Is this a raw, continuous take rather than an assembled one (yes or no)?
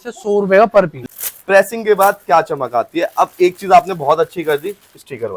no